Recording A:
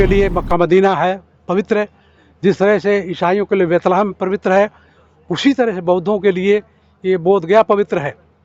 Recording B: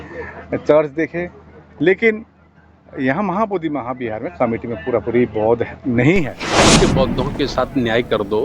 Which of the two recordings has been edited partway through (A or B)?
B